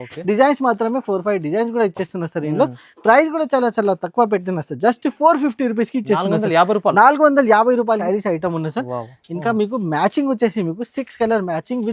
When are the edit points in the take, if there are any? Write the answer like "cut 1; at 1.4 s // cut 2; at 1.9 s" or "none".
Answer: cut 1; at 8.0 s